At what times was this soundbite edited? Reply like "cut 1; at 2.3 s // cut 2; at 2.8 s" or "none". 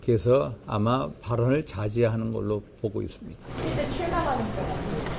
cut 1; at 3.5 s